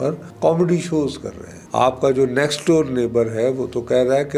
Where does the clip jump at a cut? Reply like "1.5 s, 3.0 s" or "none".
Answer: 1.6 s